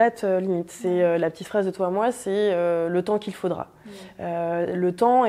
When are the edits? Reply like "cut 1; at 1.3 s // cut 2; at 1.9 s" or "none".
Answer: none